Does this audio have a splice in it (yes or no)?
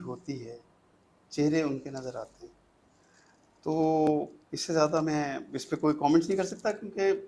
no